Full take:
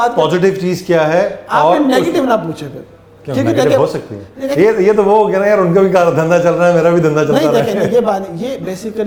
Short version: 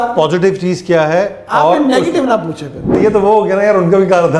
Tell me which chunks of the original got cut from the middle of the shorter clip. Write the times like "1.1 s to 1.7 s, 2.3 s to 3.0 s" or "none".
3.0 s to 4.8 s

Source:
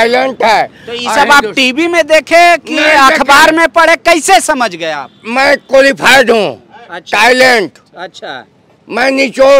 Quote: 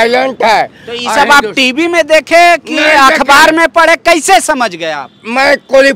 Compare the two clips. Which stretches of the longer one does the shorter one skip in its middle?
none

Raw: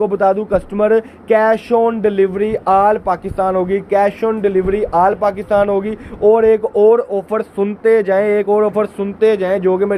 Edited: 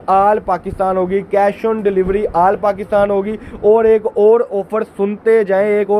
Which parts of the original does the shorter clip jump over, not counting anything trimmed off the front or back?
none

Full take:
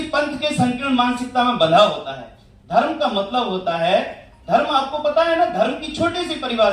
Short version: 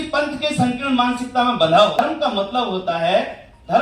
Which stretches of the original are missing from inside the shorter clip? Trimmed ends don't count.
2.0 s to 2.8 s

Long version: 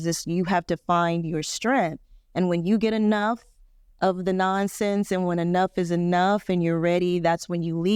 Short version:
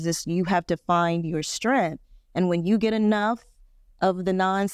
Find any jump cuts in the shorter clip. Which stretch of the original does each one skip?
none

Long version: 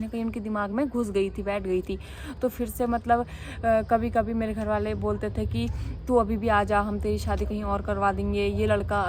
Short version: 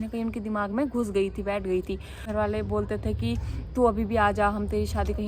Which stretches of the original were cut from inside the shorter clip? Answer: 2.3 s to 4.6 s

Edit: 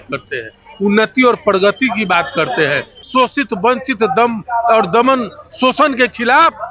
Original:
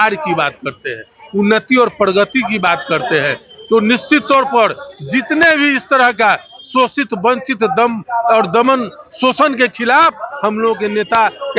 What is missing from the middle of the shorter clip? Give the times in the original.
3.5 s to 6.5 s

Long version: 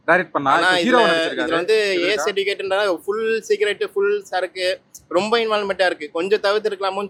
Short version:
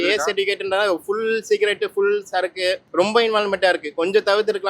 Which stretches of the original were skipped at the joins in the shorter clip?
4.8 s to 5.0 s

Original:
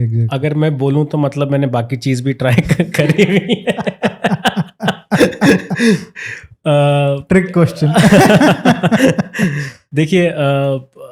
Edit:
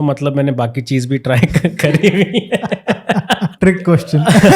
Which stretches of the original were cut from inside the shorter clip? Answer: 4.7 s to 7.2 s

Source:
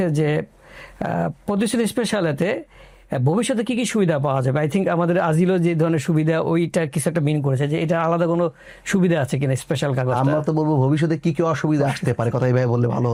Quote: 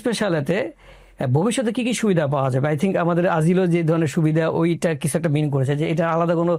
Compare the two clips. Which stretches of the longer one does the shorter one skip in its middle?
none

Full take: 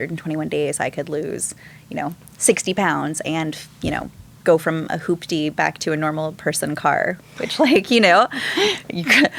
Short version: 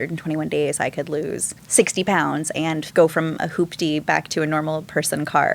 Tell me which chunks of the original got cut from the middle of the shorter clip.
1.6 s to 2.3 s, 3.5 s to 4.3 s

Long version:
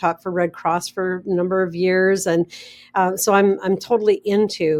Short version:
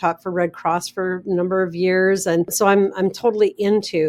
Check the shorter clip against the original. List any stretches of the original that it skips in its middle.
2.5 s to 3.2 s

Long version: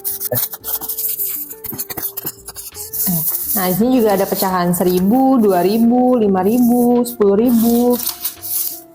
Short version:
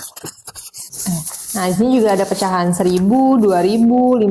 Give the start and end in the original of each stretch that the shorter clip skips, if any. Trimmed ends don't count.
none

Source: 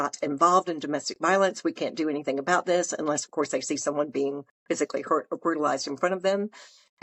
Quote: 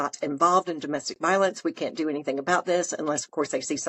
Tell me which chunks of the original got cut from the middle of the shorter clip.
none

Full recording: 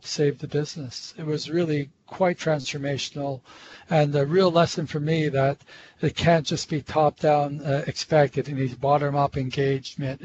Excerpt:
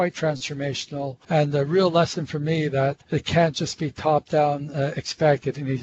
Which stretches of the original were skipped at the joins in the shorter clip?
3.4 s to 3.8 s, 5.6 s to 5.9 s

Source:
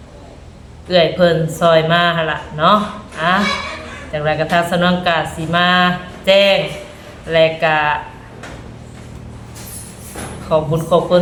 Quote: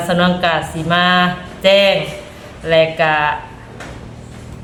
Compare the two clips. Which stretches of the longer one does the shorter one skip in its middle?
none

